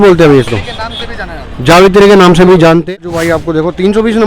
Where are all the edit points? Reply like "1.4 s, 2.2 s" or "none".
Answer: 3.0 s